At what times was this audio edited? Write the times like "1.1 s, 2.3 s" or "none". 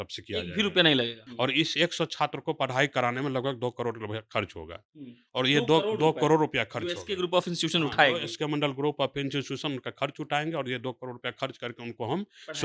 1.2 s